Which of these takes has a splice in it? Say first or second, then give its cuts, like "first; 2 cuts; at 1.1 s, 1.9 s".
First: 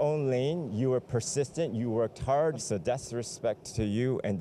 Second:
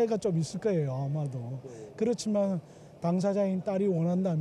first; 1 cut; at 2.6 s